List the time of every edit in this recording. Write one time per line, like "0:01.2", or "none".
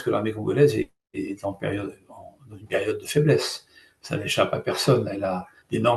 none